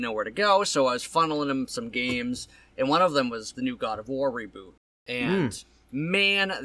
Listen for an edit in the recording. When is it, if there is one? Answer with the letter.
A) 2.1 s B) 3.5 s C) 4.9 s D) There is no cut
B